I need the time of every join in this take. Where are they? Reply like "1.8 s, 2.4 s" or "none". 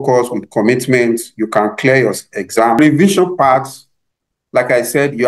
2.8 s